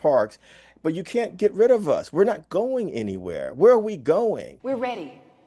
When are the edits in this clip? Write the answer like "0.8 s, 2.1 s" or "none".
4.5 s